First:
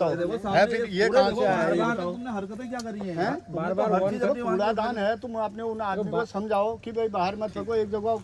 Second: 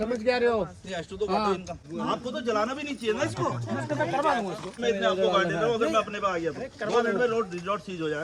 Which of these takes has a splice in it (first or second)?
second